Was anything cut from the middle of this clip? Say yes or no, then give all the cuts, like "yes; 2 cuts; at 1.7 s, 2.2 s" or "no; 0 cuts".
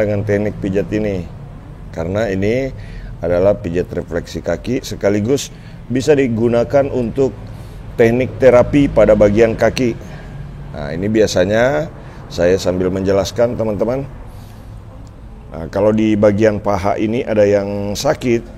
no; 0 cuts